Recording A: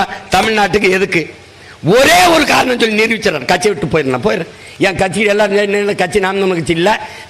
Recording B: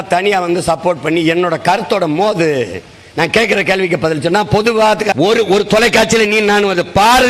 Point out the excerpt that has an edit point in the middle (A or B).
B